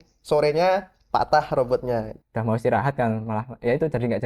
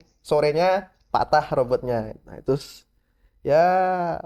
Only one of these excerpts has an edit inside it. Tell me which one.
first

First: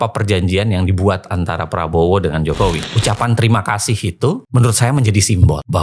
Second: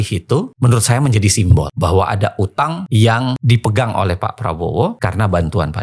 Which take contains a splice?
first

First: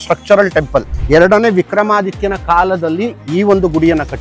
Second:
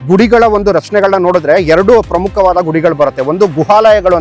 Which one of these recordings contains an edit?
first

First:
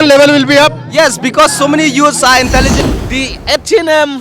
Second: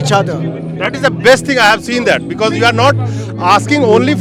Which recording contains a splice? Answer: first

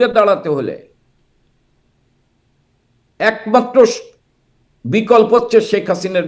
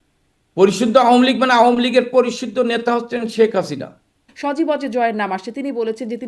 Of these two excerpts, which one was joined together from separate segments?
second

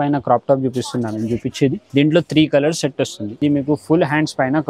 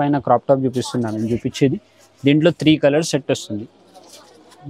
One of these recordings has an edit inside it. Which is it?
first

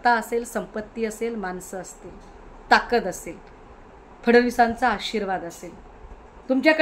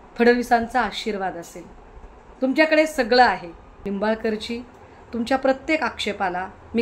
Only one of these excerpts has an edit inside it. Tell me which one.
second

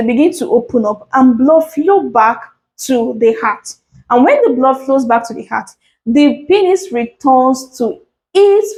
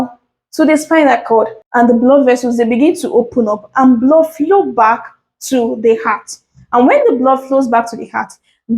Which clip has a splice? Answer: second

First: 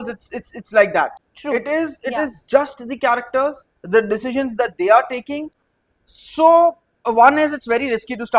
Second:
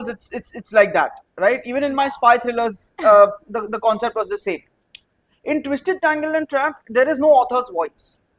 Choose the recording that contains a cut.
first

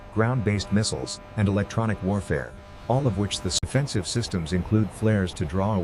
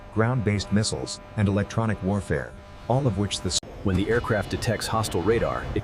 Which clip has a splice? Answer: first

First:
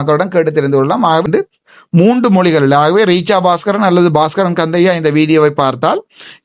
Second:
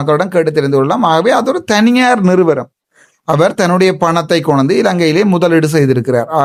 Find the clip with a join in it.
first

